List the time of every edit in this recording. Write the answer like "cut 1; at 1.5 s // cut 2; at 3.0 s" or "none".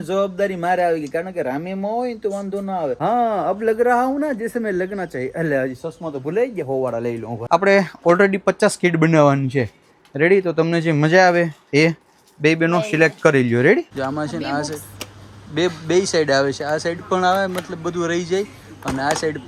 cut 1; at 3.0 s // cut 2; at 7.3 s // cut 3; at 13.9 s